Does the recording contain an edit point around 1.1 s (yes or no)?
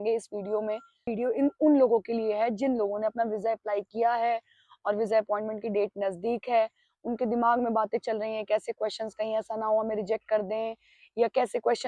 yes